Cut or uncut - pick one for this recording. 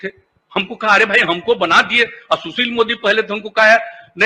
uncut